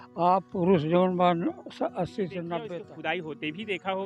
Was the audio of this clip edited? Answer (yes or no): yes